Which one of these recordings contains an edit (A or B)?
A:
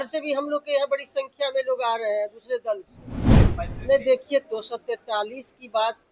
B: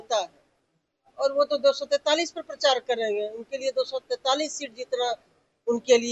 A